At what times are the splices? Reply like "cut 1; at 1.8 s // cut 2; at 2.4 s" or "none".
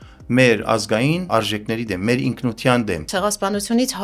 cut 1; at 1.3 s // cut 2; at 3.1 s